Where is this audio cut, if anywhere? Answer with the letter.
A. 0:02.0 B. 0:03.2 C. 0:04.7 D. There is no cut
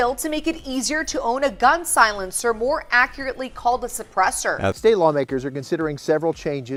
D